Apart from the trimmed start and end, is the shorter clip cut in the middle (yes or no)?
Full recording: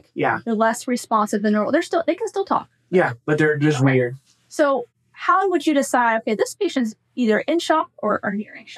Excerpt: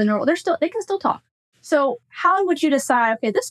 yes